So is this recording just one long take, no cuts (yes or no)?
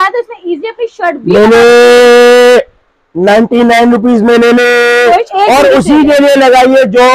no